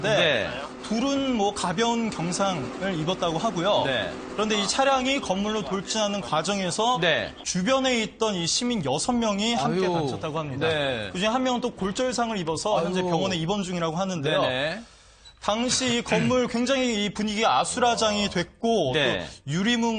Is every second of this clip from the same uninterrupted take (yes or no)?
no